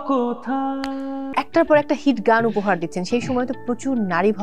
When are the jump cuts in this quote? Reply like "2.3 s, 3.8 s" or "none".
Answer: 1.3 s